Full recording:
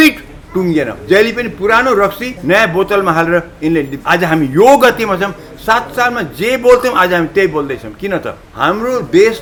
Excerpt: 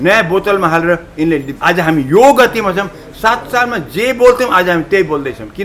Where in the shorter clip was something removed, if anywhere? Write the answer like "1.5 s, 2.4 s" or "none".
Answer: none

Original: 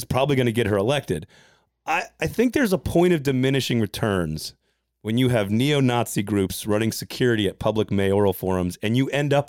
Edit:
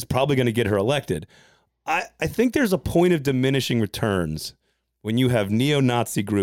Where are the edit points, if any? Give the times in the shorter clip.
none

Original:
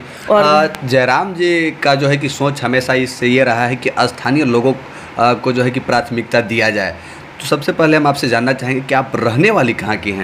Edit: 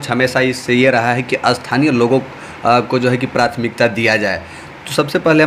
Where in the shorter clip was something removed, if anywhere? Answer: none

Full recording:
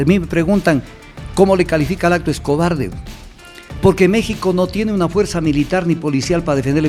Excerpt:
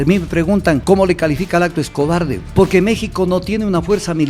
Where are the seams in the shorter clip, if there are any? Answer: 0.8 s, 2.4 s

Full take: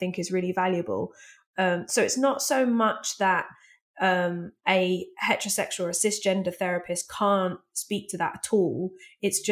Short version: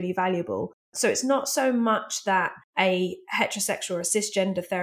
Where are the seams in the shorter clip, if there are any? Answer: 0.9 s, 2.6 s

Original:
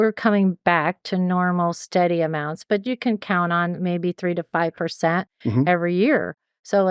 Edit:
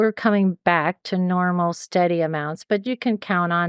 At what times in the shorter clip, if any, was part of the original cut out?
none

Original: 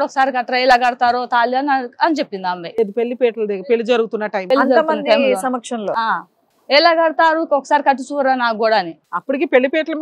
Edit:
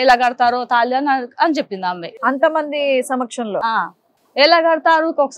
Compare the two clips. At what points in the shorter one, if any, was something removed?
2.1 s

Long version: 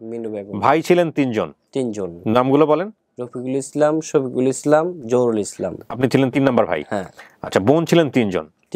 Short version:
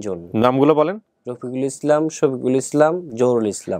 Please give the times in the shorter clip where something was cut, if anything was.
none

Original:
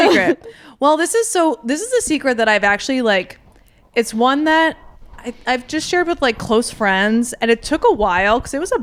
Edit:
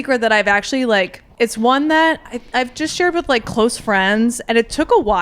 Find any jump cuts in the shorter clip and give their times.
1.2 s, 2.3 s

